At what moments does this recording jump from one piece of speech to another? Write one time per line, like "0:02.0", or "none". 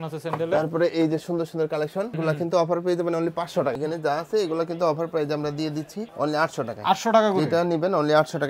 0:02.1
0:03.7

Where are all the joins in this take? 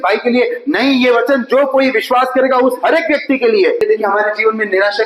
0:03.8

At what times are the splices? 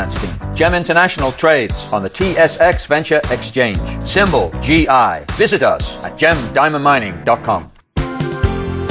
0:07.8

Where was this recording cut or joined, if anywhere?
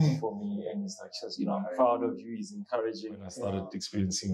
0:03.3

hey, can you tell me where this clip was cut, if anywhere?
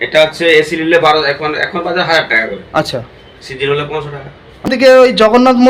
0:04.7

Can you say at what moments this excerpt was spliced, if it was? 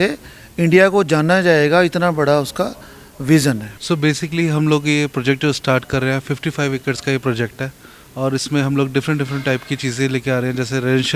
0:03.8

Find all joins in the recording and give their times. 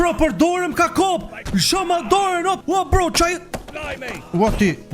0:02.5

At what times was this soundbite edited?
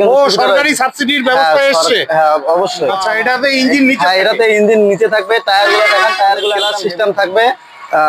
0:03.0
0:06.7

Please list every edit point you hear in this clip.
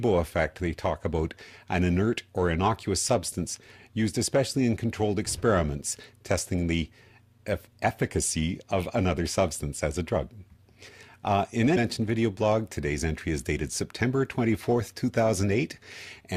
none

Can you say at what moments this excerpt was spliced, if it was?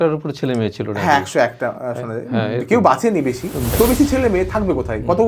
0:03.7

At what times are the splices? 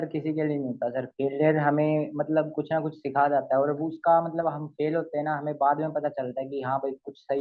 none

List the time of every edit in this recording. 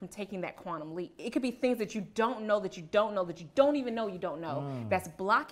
0:01.2

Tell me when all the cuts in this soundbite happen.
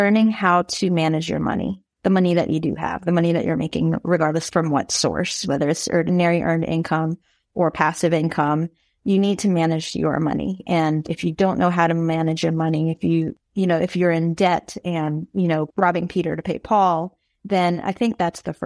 0:04.4
0:06.1
0:11.1
0:13.3
0:15.7

